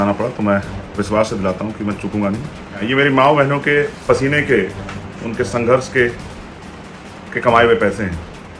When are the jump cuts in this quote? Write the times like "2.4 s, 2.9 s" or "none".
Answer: 2.8 s